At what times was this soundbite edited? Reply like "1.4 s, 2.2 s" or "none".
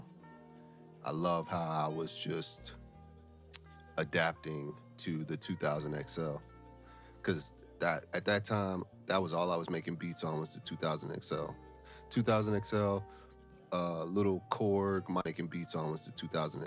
15.2 s